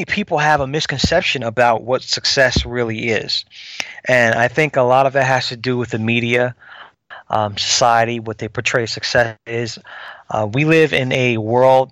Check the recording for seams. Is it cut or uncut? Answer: uncut